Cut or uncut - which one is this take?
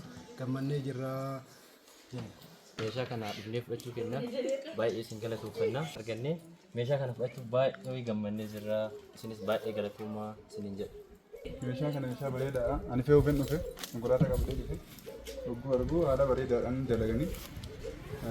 cut